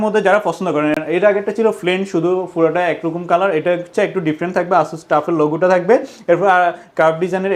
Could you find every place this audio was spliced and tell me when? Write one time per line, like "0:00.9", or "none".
none